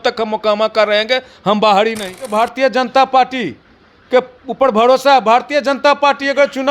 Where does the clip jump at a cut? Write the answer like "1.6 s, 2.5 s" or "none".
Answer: 2.3 s